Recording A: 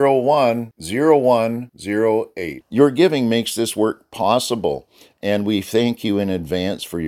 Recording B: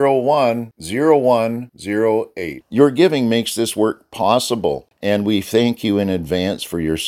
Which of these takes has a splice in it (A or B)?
B